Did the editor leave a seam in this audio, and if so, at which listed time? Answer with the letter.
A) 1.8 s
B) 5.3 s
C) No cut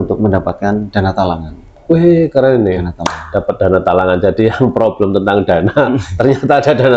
C